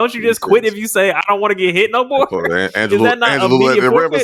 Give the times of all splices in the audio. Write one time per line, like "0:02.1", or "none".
none